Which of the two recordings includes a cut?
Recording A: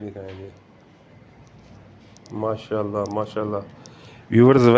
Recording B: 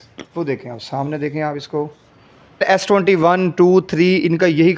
B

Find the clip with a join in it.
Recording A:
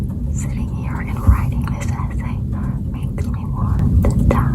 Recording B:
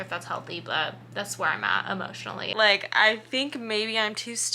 B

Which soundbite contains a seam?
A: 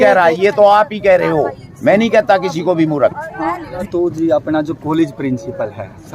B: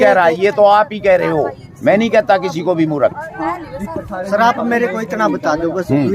A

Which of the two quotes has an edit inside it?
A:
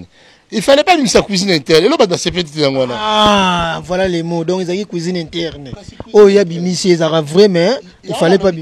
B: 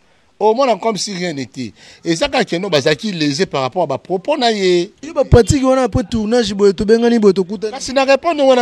B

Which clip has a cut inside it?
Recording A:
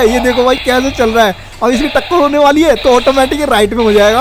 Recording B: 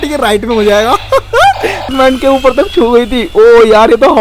B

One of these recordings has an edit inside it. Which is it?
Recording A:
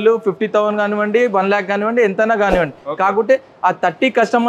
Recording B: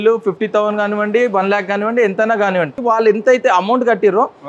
B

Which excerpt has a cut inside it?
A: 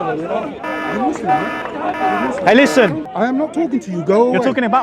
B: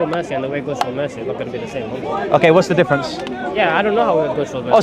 A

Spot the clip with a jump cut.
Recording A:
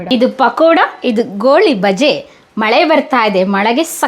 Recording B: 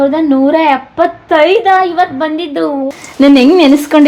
B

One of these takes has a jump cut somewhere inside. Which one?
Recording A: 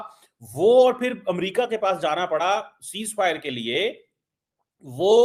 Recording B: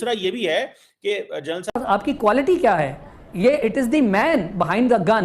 B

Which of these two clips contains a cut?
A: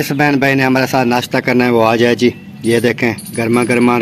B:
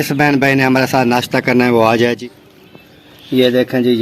B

